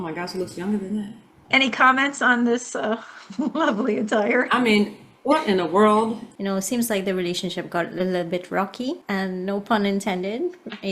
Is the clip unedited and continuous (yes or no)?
no